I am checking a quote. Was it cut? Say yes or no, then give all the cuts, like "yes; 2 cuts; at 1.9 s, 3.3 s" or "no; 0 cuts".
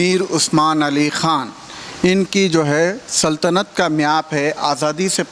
no; 0 cuts